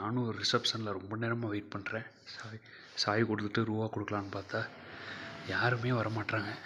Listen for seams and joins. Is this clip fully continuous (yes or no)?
yes